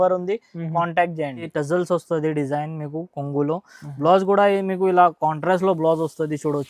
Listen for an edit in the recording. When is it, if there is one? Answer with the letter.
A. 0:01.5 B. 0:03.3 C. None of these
A